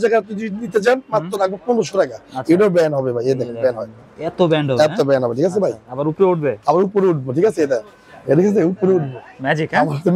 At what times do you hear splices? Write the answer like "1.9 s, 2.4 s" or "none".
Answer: none